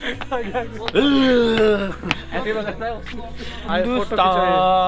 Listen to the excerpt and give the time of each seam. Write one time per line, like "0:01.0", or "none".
0:03.7